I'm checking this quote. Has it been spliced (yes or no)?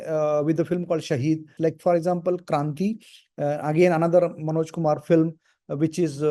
yes